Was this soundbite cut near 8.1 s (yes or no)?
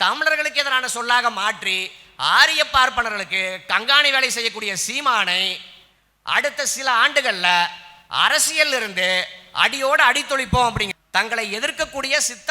no